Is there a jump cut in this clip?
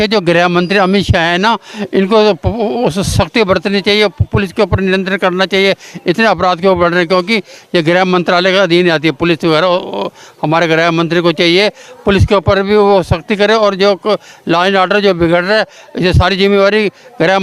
no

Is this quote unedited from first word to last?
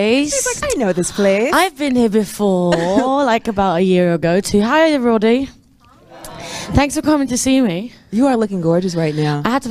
yes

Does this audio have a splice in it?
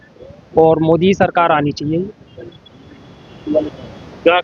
no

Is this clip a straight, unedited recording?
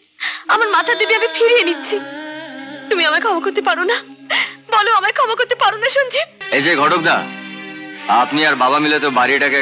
no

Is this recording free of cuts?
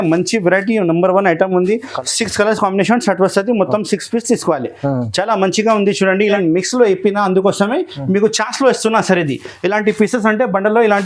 no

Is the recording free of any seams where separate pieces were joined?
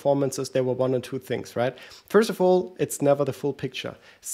yes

